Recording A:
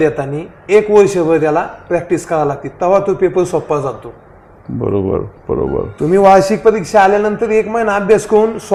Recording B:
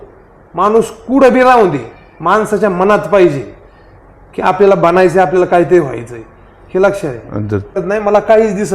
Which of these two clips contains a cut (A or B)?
B